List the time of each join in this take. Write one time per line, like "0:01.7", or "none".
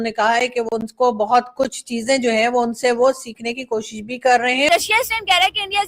0:04.7